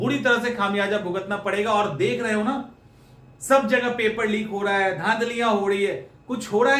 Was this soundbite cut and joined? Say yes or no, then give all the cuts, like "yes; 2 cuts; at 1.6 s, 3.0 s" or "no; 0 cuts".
no; 0 cuts